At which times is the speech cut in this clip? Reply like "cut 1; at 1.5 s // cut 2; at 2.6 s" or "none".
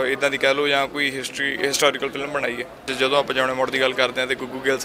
cut 1; at 2.9 s